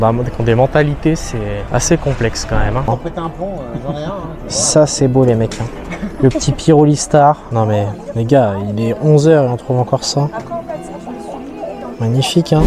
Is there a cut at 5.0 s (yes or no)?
no